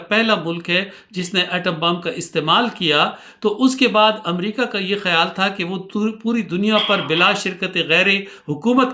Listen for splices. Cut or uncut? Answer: uncut